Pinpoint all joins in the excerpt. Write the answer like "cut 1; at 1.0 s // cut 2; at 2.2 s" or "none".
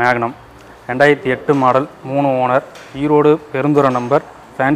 none